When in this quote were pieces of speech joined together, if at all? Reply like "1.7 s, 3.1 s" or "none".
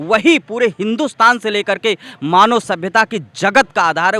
none